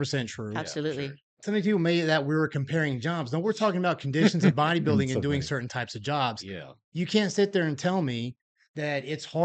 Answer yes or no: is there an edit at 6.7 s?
no